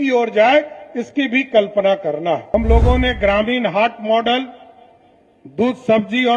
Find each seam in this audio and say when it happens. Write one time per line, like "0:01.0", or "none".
0:02.4